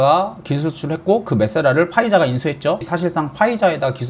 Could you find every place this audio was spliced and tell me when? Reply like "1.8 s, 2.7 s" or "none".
2.8 s